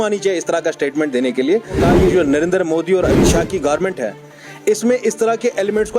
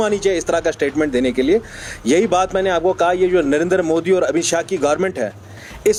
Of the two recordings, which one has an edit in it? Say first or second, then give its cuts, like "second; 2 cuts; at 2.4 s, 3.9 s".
first; 1 cut; at 1.8 s